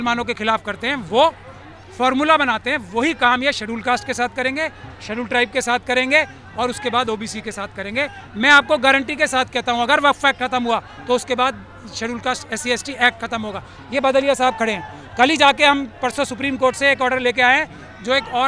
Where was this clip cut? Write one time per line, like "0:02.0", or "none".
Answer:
none